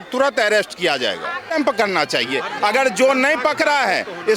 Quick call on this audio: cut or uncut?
cut